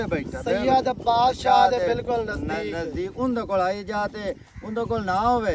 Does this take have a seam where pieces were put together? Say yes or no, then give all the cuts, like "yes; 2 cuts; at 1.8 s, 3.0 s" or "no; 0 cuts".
no; 0 cuts